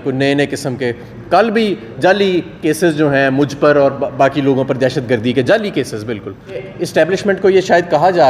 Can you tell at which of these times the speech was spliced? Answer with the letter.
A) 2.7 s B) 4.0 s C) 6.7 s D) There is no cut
C